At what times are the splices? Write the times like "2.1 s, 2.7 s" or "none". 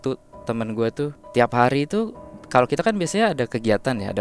1.2 s

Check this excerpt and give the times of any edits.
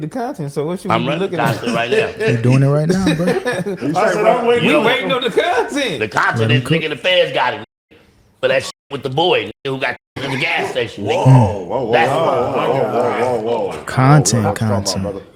none

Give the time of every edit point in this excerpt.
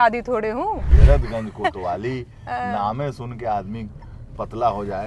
0.9 s

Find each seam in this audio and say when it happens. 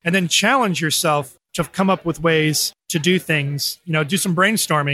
none

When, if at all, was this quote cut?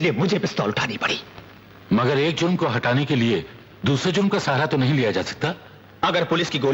5.1 s

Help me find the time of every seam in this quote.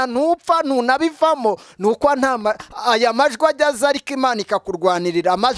none

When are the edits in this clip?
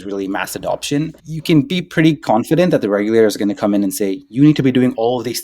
1.3 s

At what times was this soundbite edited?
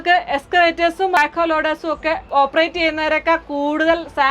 1.2 s, 2.2 s

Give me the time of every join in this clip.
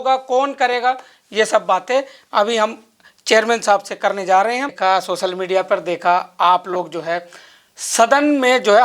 4.7 s

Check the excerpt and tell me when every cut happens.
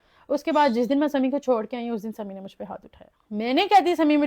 none

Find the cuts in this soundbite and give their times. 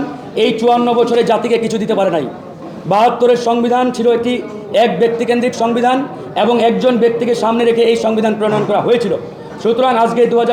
none

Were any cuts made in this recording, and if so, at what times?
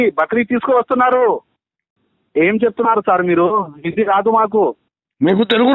1.8 s

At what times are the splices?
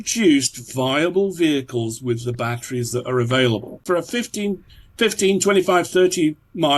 3.8 s

